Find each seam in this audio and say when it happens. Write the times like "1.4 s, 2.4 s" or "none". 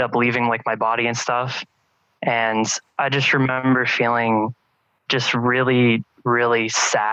none